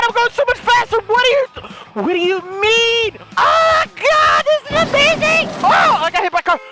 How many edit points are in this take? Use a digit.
1